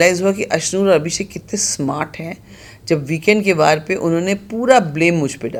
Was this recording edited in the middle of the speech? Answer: no; 0 cuts

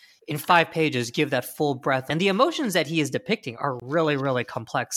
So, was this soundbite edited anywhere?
yes; 1 cut; at 2.1 s

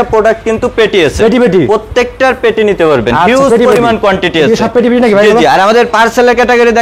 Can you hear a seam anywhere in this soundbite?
no; 0 cuts

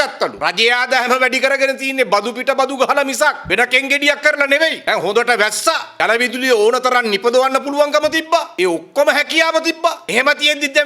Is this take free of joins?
yes; 0 cuts

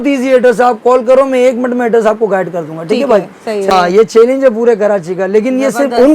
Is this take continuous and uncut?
no; 1 cut; at 3.7 s

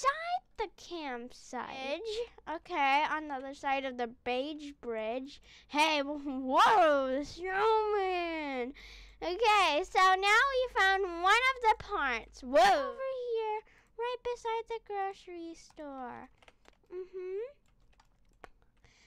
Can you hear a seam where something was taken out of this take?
yes; 2 cuts; at 1.8 s, 12.9 s

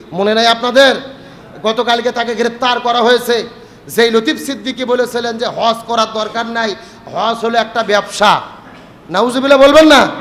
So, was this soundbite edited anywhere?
no; 0 cuts

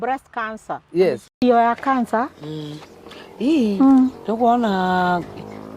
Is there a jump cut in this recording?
no; 0 cuts

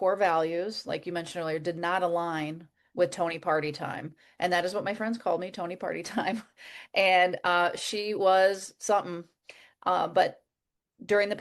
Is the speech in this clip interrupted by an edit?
no; 0 cuts

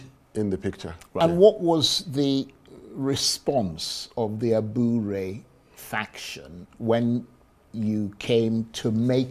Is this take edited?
yes; 1 cut; at 1.2 s

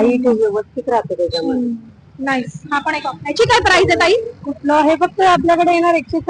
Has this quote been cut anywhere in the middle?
no; 0 cuts

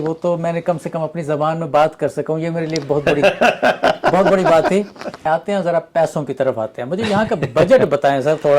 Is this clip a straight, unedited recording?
no; 1 cut; at 5.1 s

